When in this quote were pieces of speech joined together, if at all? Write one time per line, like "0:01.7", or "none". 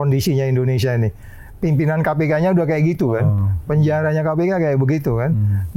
none